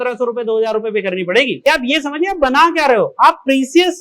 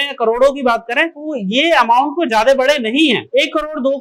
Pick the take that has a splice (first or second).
first